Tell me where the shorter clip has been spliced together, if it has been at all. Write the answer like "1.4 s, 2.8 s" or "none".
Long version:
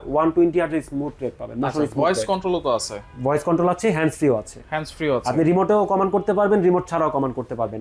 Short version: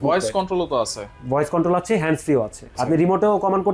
2.8 s